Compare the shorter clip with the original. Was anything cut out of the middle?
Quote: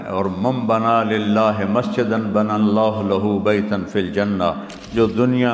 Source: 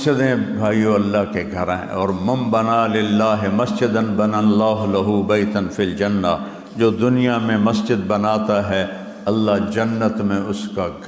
no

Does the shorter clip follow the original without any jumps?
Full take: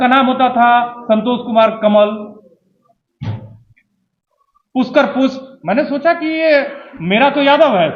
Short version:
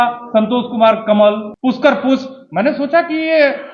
no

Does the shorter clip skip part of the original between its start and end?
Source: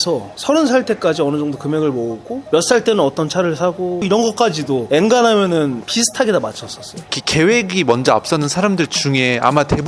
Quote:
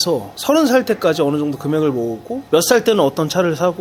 no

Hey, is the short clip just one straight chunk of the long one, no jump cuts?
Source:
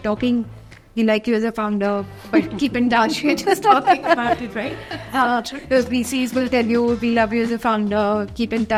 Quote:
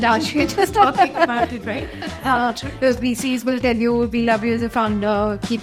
yes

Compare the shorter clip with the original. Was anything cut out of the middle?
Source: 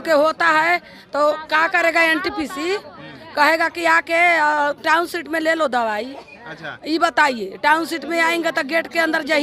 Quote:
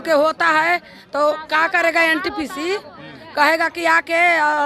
no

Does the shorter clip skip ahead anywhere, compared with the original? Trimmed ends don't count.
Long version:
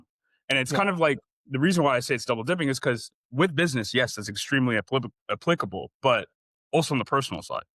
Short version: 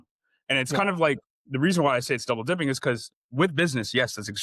no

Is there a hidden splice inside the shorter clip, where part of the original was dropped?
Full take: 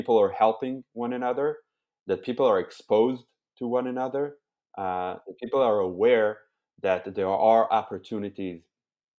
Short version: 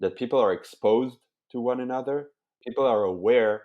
yes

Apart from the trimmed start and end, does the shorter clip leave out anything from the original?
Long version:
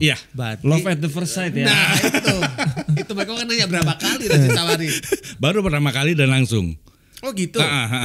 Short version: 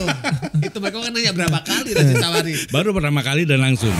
yes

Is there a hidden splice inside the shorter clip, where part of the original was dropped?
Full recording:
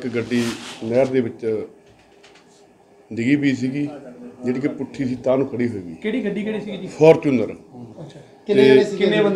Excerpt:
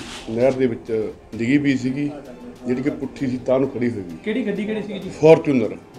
yes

